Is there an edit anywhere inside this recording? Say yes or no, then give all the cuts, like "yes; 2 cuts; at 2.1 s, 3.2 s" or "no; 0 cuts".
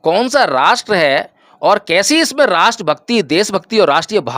no; 0 cuts